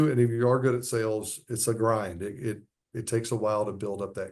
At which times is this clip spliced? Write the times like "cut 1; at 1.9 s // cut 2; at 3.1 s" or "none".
none